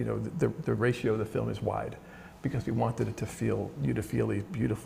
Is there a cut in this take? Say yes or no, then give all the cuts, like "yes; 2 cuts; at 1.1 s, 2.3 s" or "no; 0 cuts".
no; 0 cuts